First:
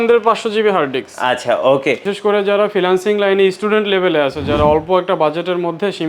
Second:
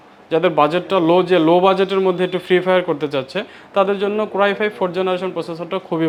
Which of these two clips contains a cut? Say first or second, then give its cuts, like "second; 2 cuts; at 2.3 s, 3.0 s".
first; 1 cut; at 2.1 s